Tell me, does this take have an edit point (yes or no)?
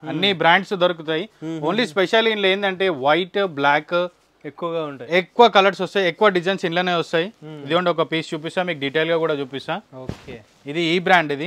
no